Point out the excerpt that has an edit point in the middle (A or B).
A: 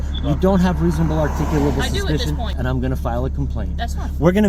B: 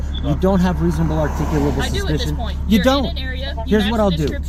A